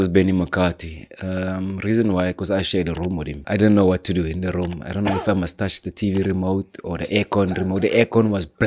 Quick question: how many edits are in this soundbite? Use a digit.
1